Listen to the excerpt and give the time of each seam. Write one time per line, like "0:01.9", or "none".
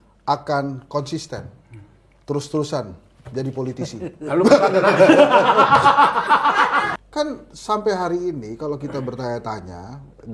0:06.9

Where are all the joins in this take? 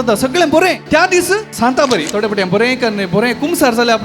0:01.1

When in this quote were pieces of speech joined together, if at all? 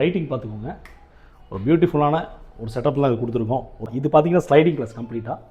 0:03.9

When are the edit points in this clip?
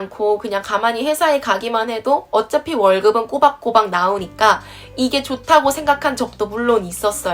none

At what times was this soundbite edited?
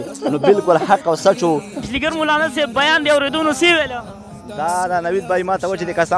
0:01.8

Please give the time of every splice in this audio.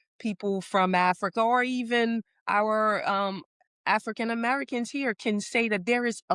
none

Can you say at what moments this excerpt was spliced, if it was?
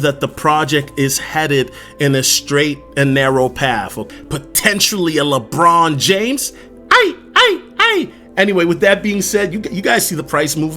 0:04.1

